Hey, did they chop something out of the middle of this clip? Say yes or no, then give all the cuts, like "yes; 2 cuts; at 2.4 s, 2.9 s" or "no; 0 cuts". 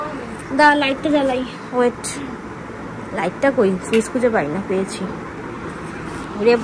no; 0 cuts